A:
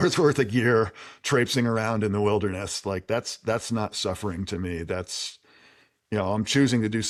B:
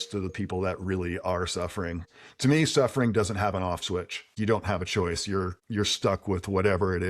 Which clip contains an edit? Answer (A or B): B